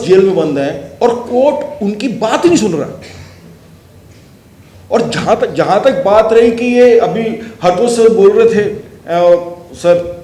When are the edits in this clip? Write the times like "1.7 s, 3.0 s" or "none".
none